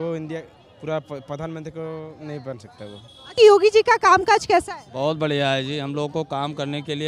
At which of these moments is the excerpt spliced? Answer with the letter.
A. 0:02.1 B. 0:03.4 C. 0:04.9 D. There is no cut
B